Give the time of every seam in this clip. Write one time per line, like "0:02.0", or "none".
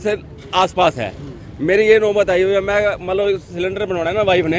none